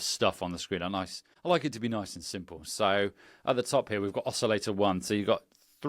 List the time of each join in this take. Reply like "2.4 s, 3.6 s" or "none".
1.2 s